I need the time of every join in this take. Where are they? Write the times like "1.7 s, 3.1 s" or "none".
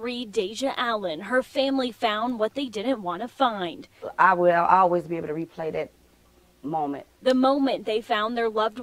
7.5 s

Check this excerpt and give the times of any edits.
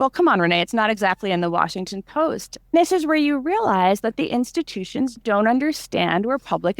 2.5 s, 5.2 s

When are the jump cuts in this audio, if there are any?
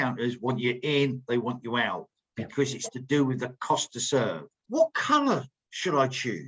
4.6 s

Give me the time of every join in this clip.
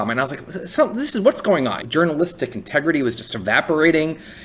1.8 s, 3.2 s

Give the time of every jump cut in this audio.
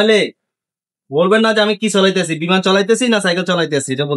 none

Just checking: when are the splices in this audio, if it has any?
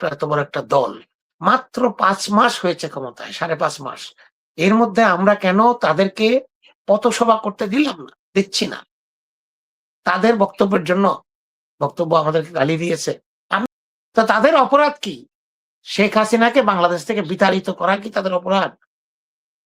13.7 s

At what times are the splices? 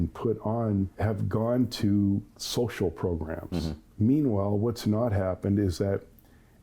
0.9 s, 3.8 s

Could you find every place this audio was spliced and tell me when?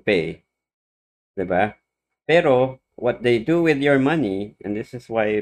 none

